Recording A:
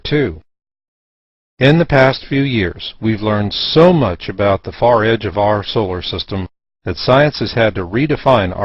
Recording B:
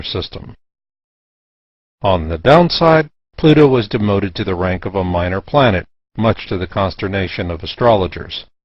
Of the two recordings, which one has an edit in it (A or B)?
A